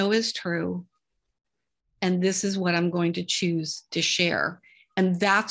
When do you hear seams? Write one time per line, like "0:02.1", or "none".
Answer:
none